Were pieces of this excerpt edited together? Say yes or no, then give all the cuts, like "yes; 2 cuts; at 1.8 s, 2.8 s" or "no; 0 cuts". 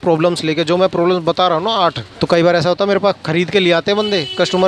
yes; 1 cut; at 2.1 s